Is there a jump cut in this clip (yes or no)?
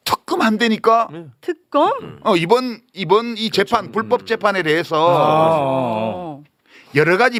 no